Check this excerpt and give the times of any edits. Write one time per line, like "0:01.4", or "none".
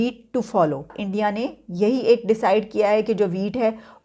0:01.0